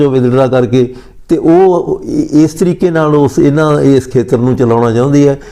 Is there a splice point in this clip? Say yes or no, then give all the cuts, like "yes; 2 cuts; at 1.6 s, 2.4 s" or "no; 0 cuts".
no; 0 cuts